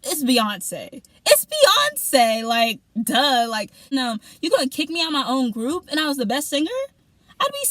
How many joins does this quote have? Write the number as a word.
one